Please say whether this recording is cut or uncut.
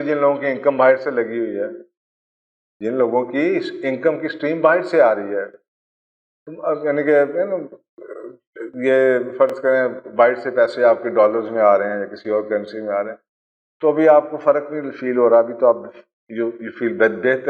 uncut